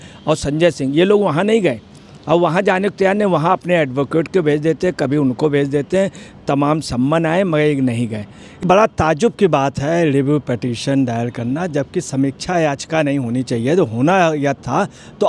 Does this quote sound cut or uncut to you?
cut